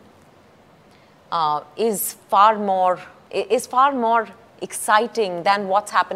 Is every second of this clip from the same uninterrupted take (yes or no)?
no